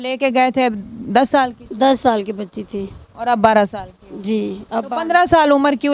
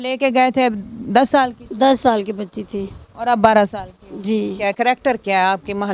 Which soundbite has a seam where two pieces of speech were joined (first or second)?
second